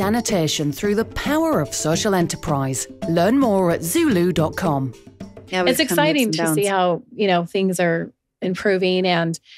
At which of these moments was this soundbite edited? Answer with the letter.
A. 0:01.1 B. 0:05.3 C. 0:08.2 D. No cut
B